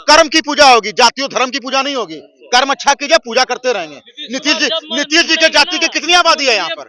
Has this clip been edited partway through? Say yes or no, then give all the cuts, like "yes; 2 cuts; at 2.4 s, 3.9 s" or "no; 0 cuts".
no; 0 cuts